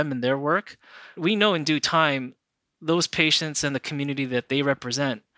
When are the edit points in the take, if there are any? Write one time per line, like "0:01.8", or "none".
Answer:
0:01.1

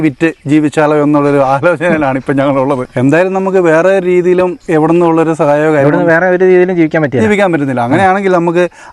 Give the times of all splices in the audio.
0:02.9
0:04.6

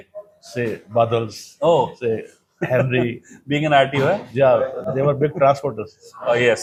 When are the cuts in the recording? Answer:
none

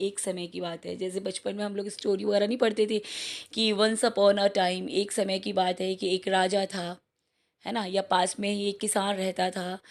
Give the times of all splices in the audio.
none

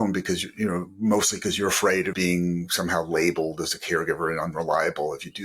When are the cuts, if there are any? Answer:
0:02.1

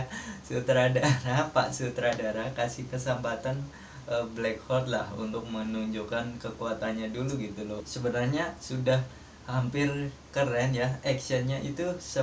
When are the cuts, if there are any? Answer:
0:07.9

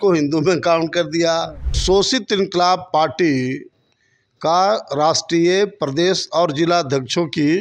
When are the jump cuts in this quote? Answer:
0:01.7

